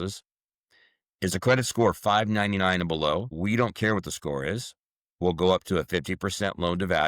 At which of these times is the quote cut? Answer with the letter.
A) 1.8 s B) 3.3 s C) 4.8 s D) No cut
B